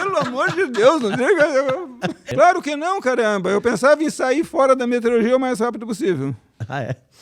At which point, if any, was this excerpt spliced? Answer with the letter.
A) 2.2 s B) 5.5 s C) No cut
A